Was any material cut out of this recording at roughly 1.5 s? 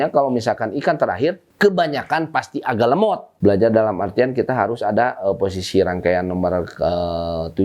yes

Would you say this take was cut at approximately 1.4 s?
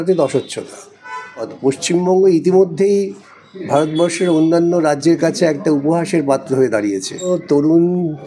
yes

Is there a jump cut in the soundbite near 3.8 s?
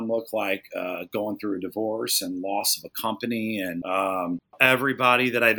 yes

